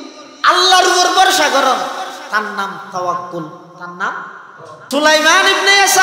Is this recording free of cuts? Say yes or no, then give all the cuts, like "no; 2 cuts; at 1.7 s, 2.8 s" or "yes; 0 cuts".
no; 1 cut; at 4.8 s